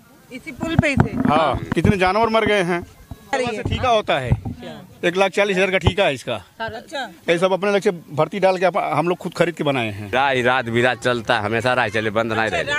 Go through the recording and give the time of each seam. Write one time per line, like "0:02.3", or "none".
0:01.6
0:03.3
0:10.1